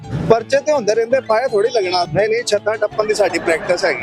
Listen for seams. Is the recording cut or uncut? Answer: cut